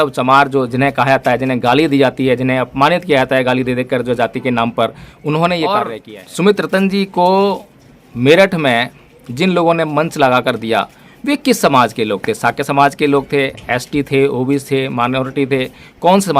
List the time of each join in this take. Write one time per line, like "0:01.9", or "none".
0:06.0